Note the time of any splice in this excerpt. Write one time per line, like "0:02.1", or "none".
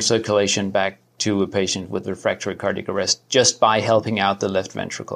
none